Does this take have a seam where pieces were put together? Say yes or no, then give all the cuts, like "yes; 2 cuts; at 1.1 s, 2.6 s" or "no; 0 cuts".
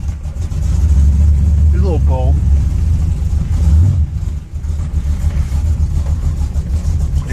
yes; 1 cut; at 4.0 s